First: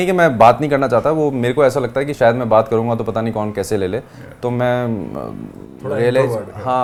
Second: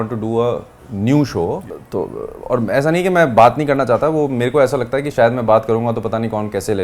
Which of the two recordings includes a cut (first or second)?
second